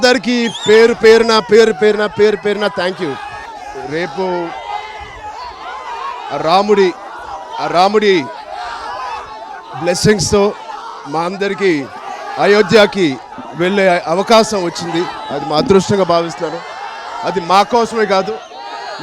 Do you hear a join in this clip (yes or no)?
yes